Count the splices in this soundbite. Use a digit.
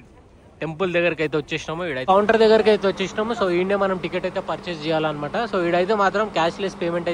1